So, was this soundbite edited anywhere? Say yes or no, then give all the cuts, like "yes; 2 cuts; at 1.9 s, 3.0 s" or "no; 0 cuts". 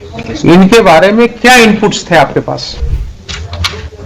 yes; 1 cut; at 2.8 s